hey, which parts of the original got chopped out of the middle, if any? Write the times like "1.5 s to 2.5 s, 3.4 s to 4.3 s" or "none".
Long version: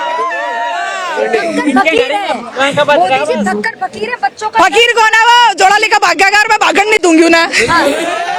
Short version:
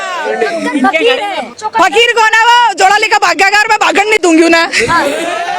2.5 s to 4.4 s